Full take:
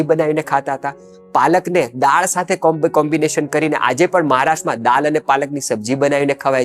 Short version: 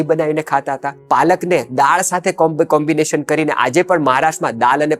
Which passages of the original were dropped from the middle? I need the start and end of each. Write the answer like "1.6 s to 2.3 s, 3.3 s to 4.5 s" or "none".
0.9 s to 1.1 s